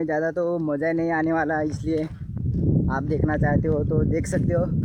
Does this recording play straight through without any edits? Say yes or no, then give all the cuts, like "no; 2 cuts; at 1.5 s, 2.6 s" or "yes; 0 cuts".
yes; 0 cuts